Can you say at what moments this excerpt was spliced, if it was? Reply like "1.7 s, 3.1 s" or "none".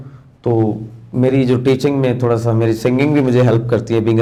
none